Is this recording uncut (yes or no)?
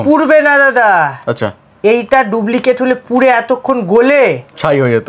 yes